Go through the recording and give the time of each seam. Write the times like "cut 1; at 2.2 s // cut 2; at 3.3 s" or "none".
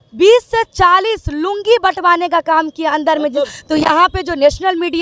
cut 1; at 3.5 s